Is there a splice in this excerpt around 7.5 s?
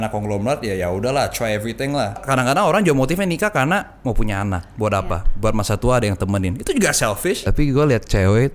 yes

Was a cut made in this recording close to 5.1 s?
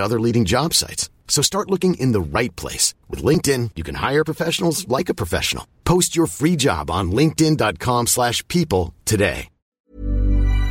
no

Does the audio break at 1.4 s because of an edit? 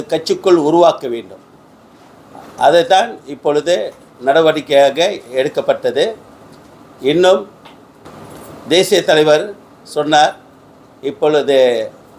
no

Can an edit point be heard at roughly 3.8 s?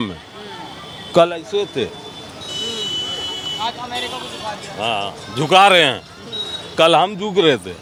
no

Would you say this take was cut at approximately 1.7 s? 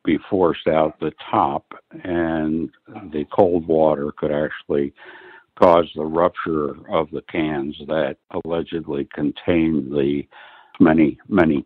no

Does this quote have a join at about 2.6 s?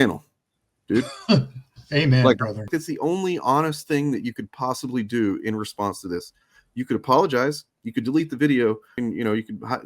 yes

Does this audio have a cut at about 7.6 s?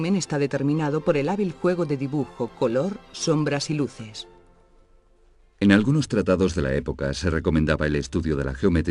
no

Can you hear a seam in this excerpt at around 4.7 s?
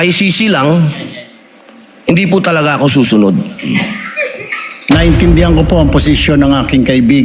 yes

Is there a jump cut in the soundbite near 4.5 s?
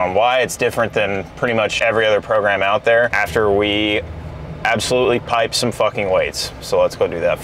no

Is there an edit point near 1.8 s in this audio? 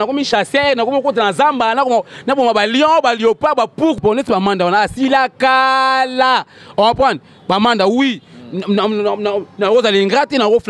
no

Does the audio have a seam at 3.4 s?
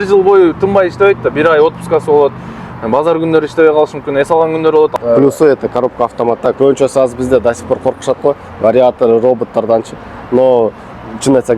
no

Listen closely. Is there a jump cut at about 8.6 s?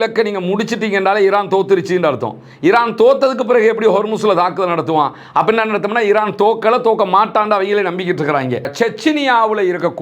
yes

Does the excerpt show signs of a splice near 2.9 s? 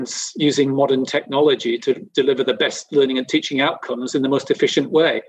no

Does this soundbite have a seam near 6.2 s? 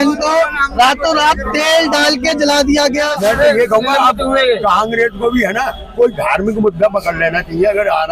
no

